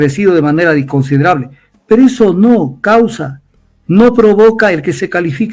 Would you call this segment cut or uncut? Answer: uncut